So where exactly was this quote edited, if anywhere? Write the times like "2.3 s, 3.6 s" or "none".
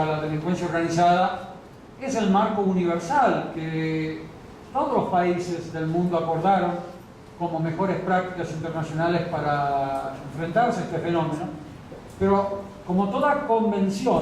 9.6 s